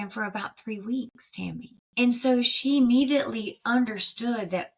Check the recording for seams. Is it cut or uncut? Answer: cut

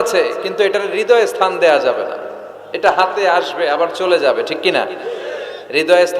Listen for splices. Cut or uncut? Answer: uncut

